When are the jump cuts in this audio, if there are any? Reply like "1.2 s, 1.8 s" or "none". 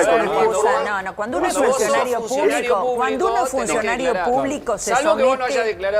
none